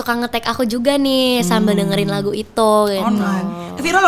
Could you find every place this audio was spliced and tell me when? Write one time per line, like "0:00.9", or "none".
none

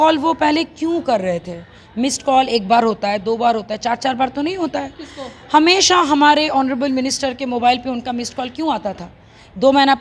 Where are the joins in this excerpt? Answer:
none

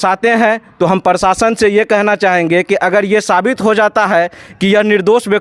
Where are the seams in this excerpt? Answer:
none

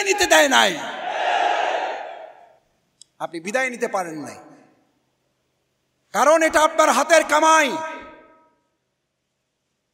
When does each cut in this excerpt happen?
none

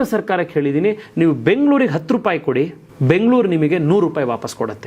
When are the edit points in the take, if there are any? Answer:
0:02.9

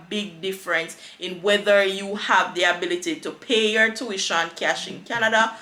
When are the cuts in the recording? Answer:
none

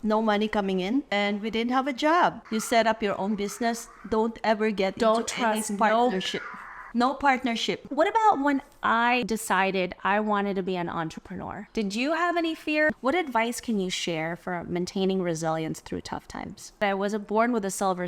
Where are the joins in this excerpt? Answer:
0:01.1
0:02.4
0:07.8
0:09.2
0:12.9
0:16.8

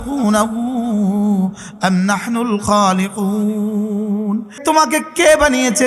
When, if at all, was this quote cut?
0:04.6

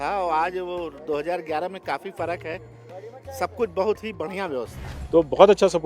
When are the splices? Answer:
0:04.9

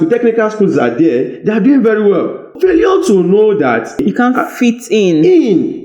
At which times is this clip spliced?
0:02.5
0:04.0

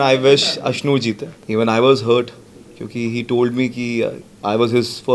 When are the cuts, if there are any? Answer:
0:01.3

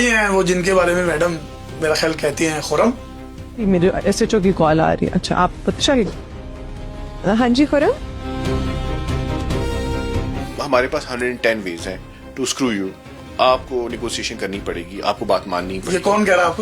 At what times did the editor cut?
0:10.4

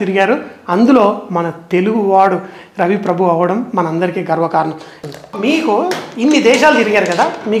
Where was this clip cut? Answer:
0:05.0

